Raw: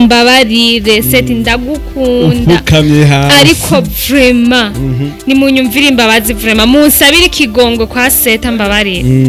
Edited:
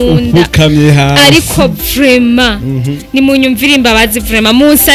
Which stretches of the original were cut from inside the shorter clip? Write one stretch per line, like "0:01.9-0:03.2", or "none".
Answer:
none